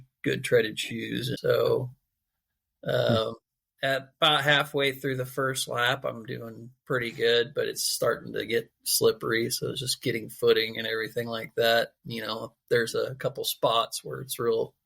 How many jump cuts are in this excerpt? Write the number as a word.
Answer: one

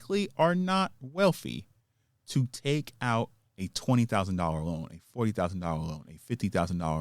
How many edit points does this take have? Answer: one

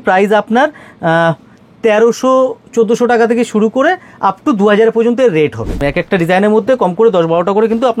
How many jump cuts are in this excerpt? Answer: one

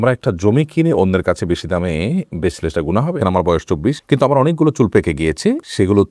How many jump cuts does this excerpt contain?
one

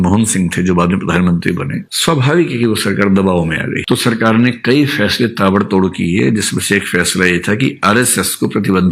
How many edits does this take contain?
one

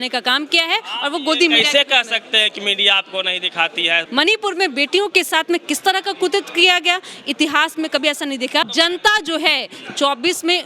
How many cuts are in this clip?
two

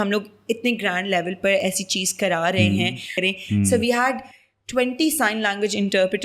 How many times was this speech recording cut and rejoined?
one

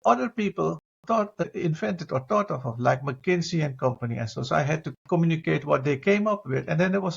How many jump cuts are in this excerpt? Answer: two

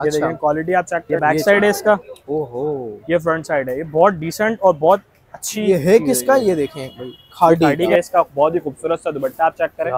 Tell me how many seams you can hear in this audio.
two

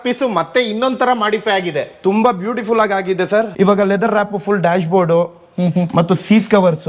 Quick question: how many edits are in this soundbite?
one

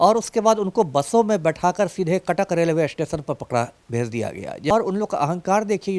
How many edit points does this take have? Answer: one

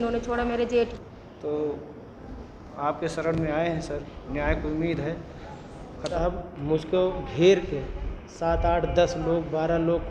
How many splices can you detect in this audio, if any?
two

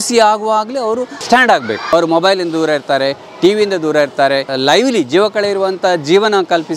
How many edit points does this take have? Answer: three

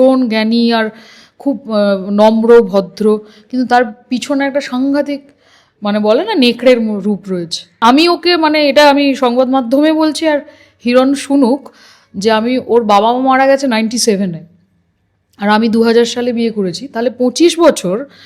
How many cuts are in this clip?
one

